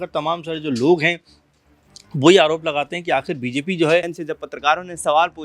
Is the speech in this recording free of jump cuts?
no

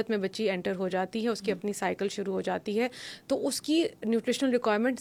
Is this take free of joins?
yes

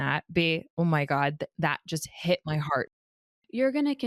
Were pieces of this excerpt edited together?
yes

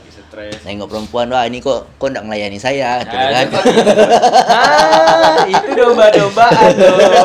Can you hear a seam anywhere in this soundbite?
no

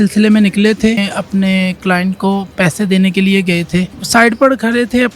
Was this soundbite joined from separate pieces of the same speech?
yes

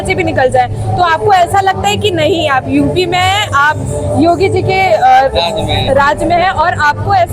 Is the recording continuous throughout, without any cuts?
yes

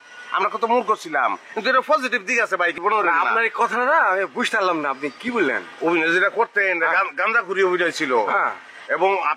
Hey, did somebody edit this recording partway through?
yes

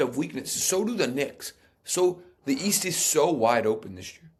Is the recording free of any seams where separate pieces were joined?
yes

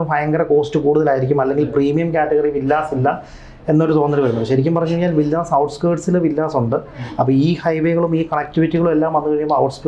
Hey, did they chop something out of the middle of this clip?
no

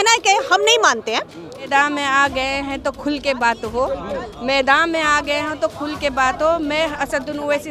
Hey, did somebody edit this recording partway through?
yes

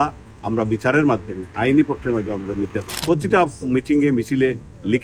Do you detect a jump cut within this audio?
yes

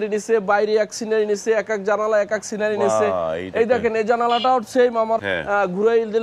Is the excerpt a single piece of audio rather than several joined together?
no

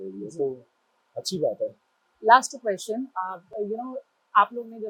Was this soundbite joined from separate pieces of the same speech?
no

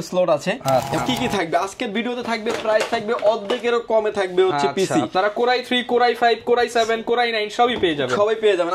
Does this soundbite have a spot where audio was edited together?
yes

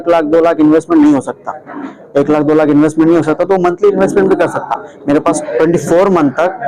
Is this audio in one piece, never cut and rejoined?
no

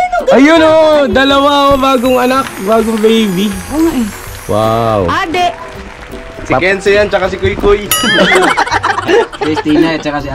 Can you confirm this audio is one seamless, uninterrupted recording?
yes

